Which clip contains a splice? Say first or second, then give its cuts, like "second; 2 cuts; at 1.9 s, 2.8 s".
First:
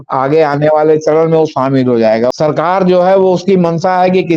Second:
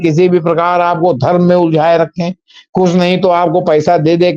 first; 1 cut; at 2.3 s